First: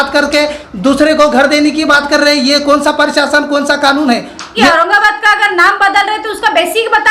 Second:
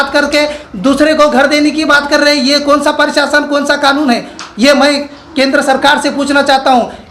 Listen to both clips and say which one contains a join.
first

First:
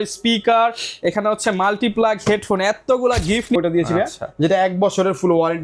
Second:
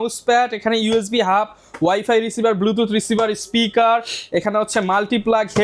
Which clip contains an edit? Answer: first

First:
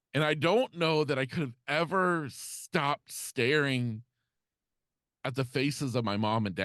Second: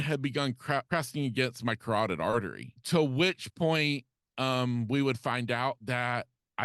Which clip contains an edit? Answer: second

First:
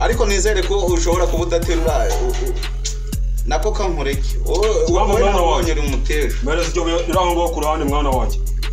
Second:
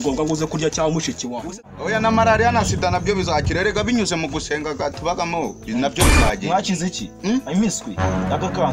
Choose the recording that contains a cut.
second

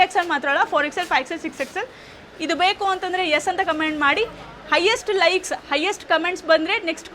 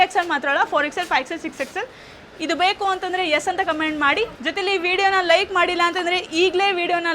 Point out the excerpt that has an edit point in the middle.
second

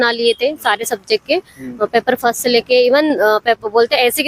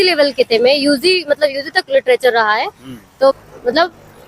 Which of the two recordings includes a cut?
second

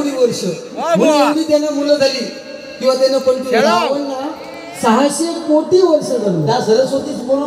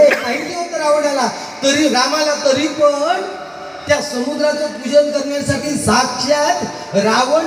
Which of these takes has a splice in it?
first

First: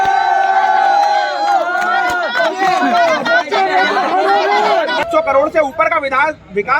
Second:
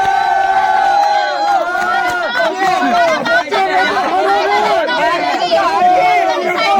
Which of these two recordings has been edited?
first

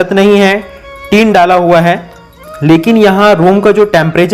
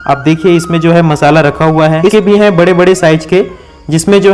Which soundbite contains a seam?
second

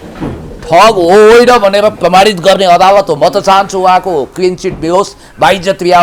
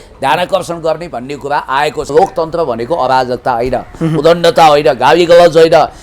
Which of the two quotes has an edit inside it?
second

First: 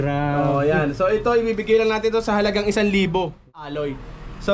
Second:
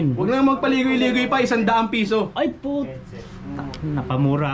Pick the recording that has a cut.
first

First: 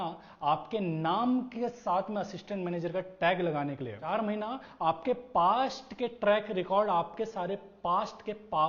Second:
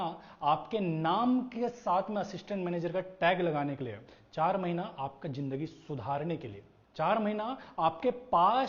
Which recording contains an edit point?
first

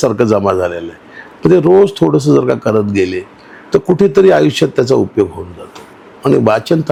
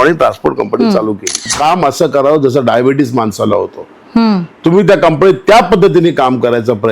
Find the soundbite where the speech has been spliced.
second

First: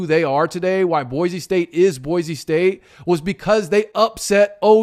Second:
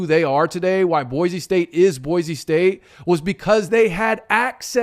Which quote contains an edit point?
second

